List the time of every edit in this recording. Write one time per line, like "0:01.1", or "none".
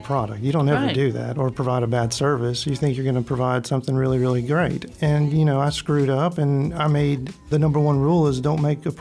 0:07.5